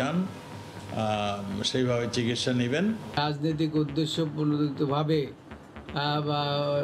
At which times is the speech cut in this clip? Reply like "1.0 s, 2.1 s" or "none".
3.2 s